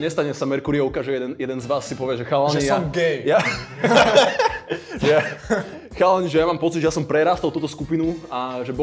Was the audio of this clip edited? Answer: no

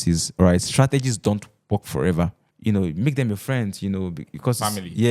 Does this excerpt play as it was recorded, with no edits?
no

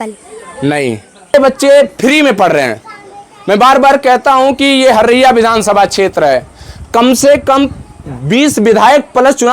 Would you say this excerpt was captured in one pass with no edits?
no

